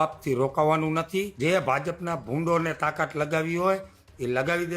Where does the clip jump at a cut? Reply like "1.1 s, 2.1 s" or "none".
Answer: 1.3 s